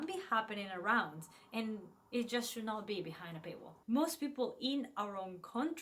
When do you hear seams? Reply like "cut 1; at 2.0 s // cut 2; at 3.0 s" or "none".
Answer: cut 1; at 3.7 s